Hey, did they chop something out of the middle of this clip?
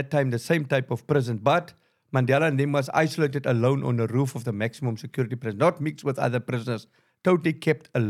no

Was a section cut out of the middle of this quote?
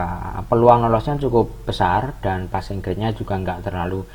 no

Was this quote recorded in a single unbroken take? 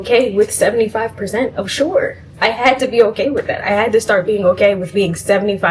yes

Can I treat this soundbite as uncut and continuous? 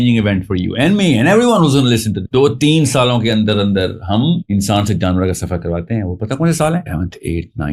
yes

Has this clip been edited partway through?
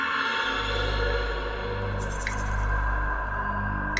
no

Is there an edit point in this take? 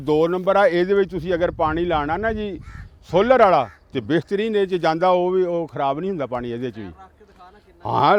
no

